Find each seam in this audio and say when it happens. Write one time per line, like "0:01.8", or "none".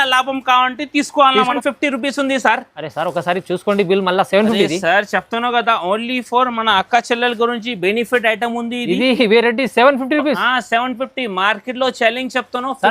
0:01.5